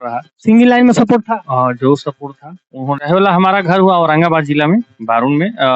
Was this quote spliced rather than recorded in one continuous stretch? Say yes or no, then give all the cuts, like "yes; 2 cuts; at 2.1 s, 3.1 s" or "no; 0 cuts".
yes; 1 cut; at 3.0 s